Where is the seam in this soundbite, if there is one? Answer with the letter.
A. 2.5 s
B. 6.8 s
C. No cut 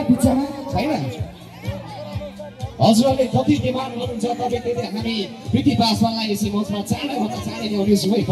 C